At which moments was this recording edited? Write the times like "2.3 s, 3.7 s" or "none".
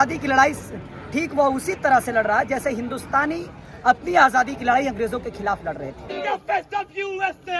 6.1 s